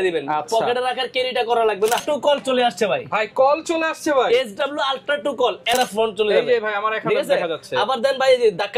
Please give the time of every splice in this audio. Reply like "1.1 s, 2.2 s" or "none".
2.0 s, 5.7 s